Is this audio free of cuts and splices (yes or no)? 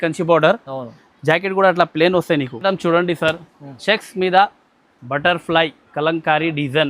no